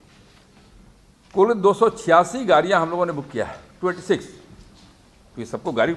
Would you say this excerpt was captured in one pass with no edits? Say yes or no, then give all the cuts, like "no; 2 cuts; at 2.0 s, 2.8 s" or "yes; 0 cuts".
yes; 0 cuts